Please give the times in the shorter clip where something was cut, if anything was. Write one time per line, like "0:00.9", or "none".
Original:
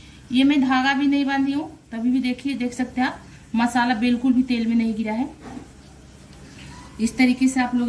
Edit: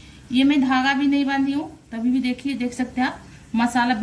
none

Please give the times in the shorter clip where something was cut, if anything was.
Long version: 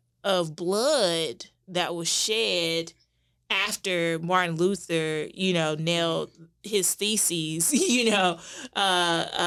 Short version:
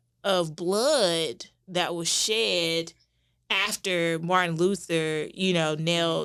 none

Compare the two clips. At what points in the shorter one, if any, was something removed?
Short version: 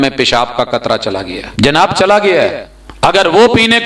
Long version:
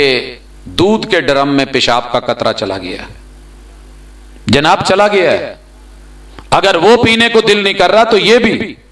0:01.4
0:02.3

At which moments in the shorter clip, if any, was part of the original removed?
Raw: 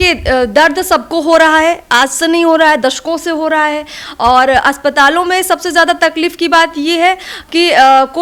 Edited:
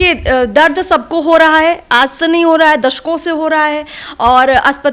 none

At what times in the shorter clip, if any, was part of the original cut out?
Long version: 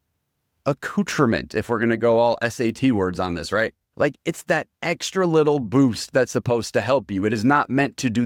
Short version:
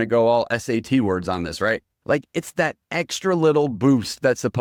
none

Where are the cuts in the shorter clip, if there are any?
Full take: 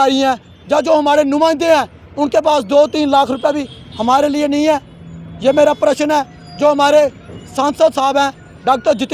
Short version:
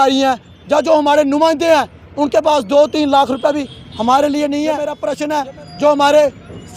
0:05.1

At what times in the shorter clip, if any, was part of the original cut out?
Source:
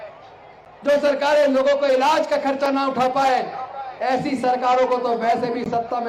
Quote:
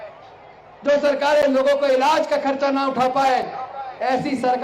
none

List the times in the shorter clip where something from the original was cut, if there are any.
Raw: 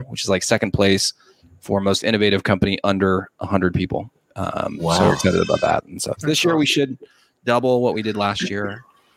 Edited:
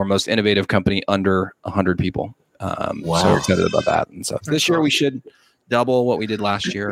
none

